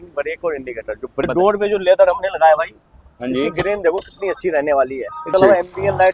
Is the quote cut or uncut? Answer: cut